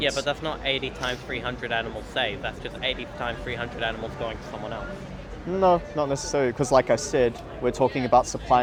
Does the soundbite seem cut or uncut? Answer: uncut